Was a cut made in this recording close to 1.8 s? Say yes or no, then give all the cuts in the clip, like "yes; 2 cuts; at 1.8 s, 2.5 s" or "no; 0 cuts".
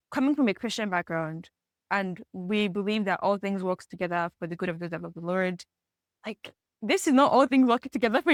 no; 0 cuts